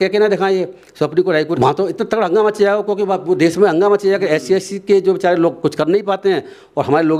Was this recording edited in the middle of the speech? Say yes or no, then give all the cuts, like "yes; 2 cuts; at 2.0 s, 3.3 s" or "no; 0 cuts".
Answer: yes; 1 cut; at 1.6 s